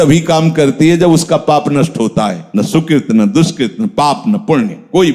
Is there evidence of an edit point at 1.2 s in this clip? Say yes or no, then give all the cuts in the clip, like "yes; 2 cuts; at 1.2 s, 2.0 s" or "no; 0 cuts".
no; 1 cut; at 2.4 s